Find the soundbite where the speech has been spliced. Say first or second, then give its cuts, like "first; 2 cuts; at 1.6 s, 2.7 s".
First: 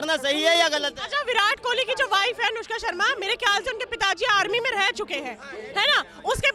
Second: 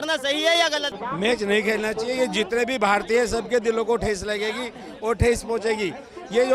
second; 1 cut; at 0.9 s